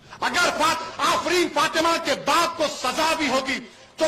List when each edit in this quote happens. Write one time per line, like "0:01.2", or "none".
none